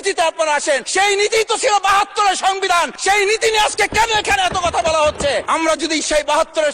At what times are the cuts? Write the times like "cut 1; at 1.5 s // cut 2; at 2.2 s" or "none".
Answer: cut 1; at 0.9 s // cut 2; at 2.9 s // cut 3; at 5.4 s